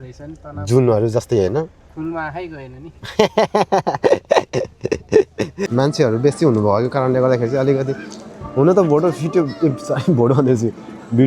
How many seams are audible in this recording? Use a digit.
1